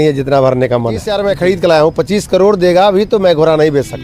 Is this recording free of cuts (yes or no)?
no